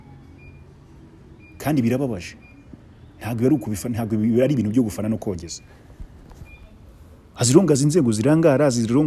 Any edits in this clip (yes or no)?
no